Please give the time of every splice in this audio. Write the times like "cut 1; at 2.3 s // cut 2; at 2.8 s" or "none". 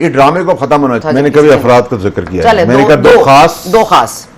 cut 1; at 1.0 s